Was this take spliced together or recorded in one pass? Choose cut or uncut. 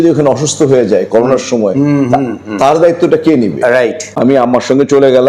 uncut